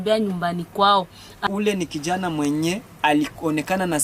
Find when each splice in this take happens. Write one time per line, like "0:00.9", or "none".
0:01.4